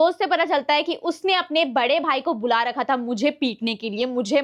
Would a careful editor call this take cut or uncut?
uncut